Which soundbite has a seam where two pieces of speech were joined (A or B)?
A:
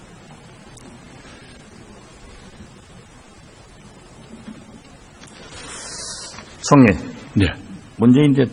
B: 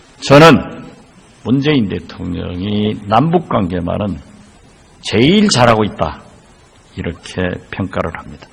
B